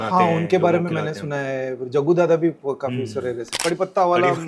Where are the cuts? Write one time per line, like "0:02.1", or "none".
0:03.6

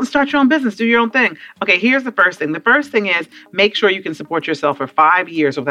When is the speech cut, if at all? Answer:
none

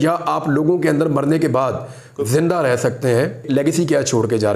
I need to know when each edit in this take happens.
0:03.5

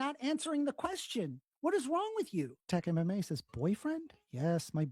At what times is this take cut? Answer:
0:02.7

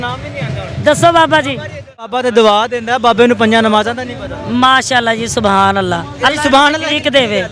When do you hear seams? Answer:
0:02.2

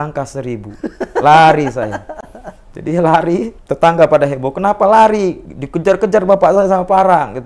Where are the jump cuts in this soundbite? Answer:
0:03.6

